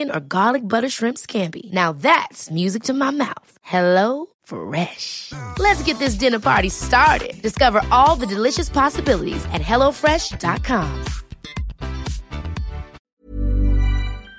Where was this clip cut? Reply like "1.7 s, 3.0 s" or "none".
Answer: 13.2 s

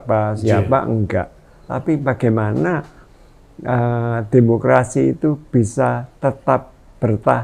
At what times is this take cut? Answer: 1.7 s

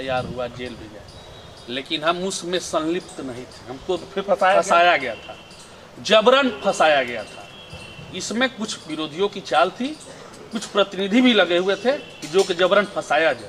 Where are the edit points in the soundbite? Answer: none

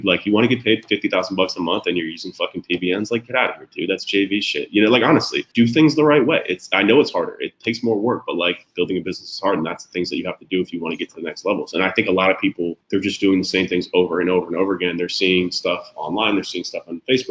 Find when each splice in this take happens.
5.4 s, 12.8 s

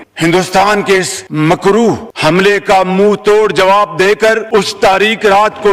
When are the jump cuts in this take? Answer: none

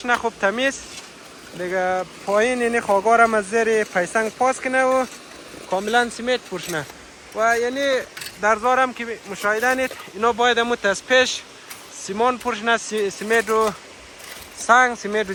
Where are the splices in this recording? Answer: none

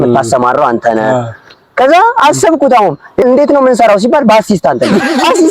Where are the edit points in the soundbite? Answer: 3.2 s

